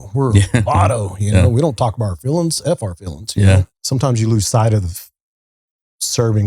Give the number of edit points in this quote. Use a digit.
1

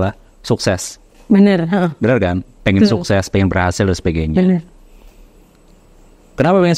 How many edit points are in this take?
0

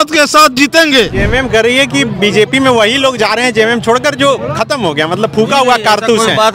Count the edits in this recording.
1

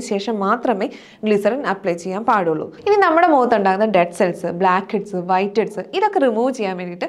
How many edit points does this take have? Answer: 1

